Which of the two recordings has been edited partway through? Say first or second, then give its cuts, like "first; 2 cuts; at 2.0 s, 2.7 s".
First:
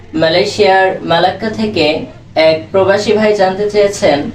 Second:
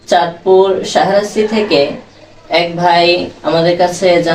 first; 1 cut; at 2.2 s